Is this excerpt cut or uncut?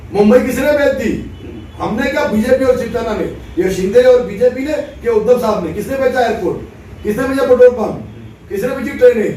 uncut